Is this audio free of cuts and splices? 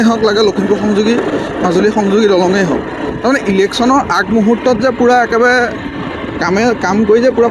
yes; 0 cuts

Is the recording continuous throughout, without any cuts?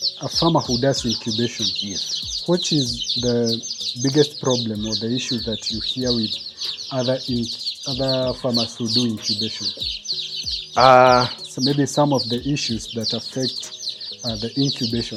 yes; 0 cuts

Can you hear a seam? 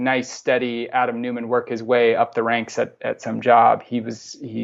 no; 0 cuts

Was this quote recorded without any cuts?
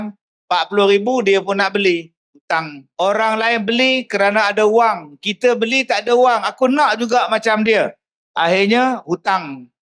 no; 1 cut; at 2.8 s

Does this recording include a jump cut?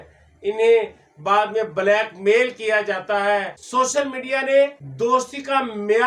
yes; 2 cuts; at 3.6 s, 4.8 s

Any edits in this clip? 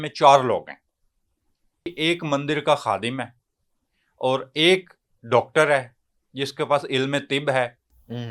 yes; 1 cut; at 1.9 s

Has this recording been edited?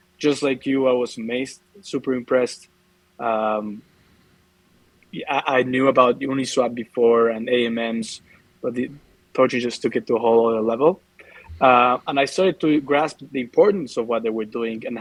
no; 0 cuts

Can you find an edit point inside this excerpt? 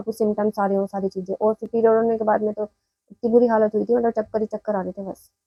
no; 0 cuts

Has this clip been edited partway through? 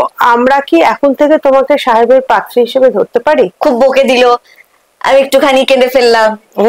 yes; 1 cut; at 3.5 s

